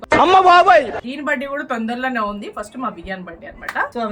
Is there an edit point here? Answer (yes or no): no